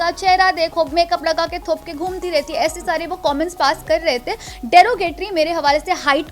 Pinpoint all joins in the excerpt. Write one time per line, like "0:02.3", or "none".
none